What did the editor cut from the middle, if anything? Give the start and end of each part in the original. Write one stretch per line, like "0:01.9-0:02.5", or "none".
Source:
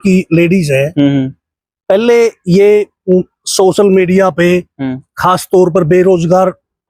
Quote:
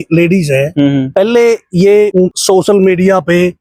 0:01.3-0:01.8
0:03.0-0:03.3